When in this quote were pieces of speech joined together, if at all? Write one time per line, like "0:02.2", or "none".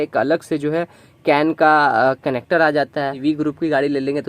0:03.2

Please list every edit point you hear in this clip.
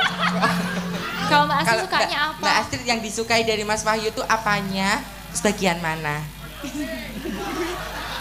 0:01.3

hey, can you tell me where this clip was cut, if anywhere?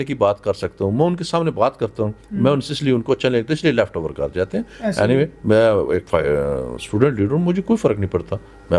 none

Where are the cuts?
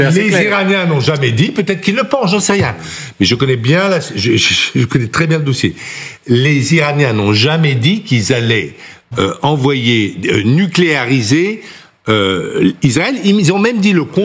none

